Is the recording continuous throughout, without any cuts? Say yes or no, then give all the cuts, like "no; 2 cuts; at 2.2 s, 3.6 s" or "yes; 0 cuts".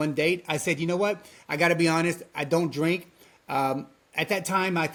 yes; 0 cuts